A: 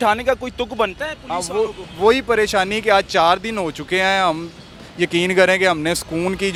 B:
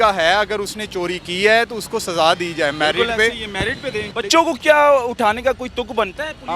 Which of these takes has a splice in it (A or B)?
B